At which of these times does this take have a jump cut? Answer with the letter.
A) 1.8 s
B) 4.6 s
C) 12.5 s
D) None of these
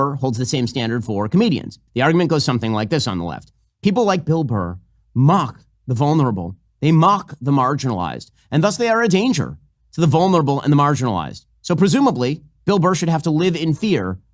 A